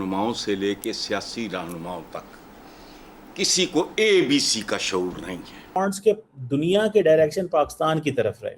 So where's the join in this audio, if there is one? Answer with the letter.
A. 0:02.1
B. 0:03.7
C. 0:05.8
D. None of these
C